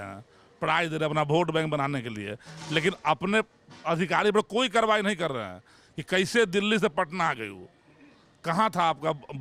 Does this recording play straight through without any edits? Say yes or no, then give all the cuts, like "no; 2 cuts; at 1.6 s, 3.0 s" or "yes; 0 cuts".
yes; 0 cuts